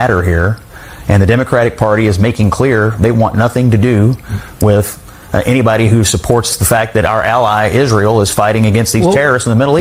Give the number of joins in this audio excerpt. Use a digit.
0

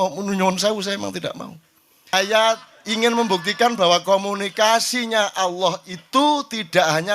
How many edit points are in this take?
1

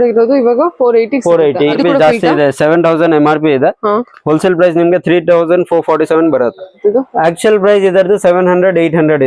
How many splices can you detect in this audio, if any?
2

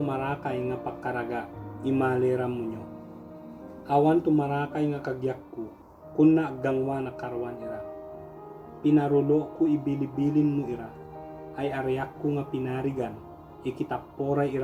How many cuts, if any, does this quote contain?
0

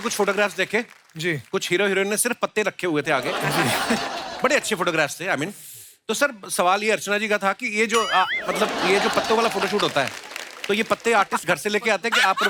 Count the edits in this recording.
0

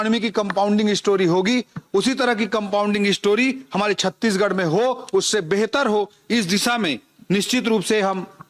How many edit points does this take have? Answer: 0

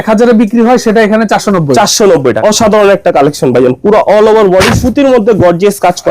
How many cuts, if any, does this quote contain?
1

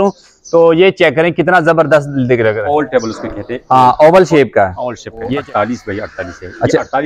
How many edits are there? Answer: 2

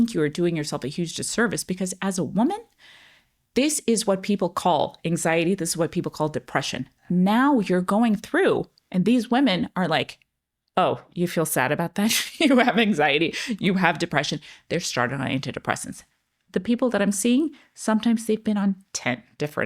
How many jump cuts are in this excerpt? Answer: 1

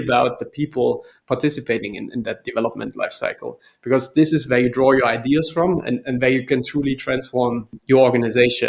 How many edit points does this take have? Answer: 1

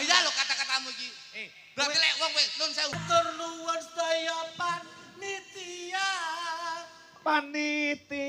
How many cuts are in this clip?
1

